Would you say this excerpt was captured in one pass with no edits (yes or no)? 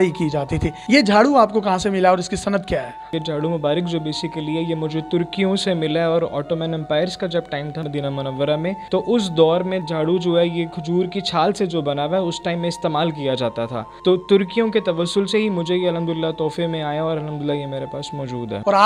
yes